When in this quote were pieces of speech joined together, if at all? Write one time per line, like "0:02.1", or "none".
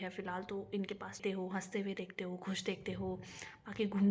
0:01.2